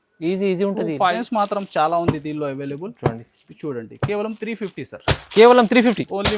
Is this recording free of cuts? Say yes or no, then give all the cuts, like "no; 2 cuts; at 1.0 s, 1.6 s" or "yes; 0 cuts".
no; 1 cut; at 1.2 s